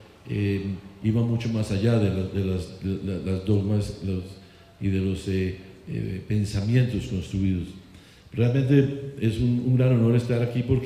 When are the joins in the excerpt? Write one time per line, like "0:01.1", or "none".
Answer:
none

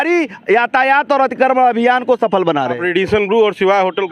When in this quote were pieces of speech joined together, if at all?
0:02.8

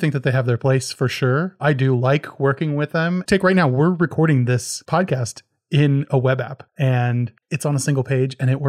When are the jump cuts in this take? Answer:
0:03.2
0:04.7
0:06.6
0:07.4

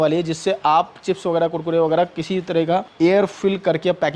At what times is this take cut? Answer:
0:03.2

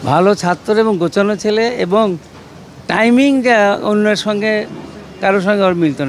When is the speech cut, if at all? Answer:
none

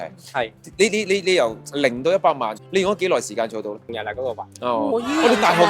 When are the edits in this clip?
0:02.6
0:03.9

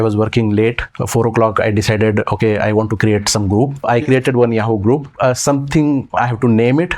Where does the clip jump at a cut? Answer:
0:00.9
0:03.9
0:05.1

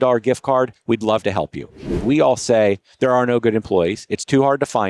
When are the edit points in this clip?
0:02.0

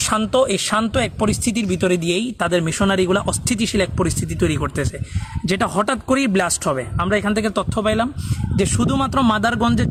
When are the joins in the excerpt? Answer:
none

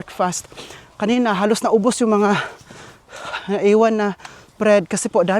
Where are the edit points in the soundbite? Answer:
none

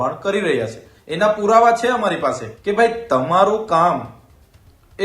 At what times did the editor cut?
0:02.5

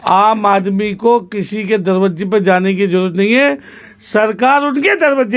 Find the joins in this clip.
none

